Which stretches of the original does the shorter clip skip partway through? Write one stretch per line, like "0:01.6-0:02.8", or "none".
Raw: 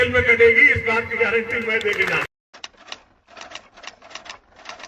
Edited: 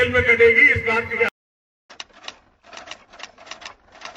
0:01.3-0:01.9